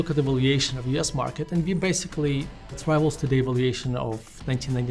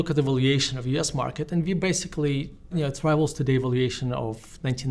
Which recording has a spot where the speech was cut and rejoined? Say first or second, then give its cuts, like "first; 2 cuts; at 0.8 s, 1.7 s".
first; 1 cut; at 2.7 s